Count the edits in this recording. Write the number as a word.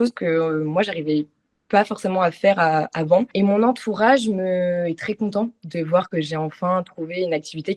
one